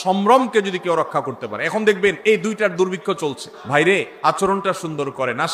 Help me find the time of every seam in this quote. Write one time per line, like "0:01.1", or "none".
0:02.2
0:03.2
0:04.4